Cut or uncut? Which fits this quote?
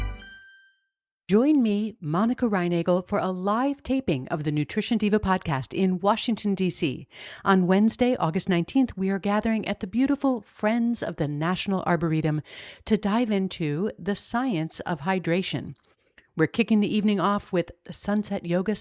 cut